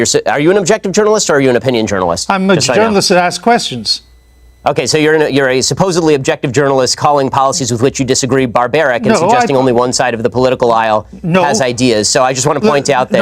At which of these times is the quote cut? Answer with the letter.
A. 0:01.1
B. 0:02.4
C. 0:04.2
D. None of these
B